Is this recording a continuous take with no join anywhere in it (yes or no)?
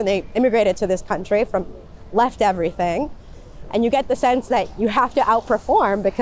yes